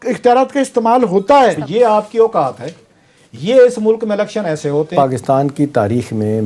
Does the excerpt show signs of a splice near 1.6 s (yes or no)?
yes